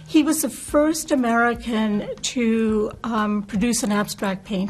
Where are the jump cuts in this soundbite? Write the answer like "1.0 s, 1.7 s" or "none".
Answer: none